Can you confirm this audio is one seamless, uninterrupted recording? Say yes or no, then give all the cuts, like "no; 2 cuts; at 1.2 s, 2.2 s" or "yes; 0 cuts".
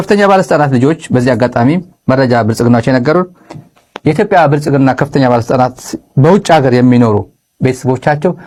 yes; 0 cuts